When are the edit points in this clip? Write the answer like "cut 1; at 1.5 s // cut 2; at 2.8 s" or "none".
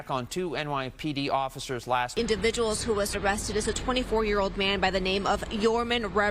none